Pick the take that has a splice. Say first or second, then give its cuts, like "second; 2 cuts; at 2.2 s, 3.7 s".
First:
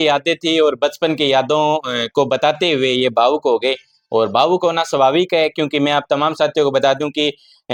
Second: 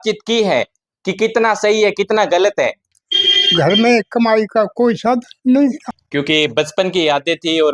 second; 2 cuts; at 2.9 s, 5.9 s